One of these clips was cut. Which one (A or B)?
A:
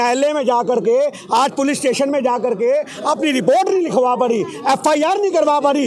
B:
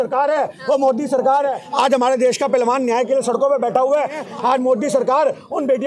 B